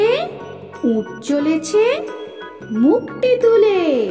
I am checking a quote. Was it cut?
no; 0 cuts

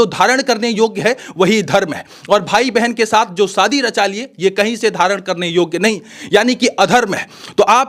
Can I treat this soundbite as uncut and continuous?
yes; 0 cuts

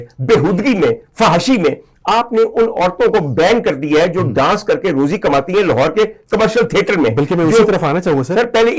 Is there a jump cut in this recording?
no; 0 cuts

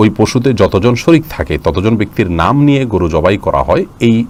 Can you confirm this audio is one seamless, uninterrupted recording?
yes; 0 cuts

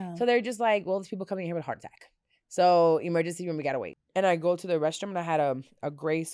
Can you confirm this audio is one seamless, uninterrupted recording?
no; 1 cut; at 4.0 s

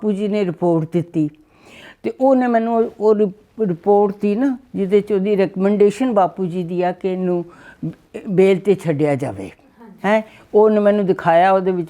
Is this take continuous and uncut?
yes; 0 cuts

